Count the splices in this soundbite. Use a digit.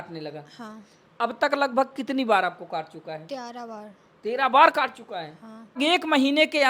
1